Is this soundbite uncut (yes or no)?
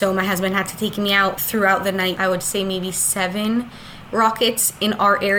no